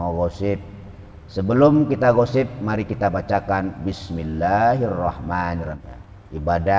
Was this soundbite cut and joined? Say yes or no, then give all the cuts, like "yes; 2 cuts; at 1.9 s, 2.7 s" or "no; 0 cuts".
yes; 1 cut; at 5.8 s